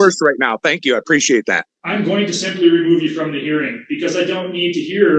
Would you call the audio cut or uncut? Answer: cut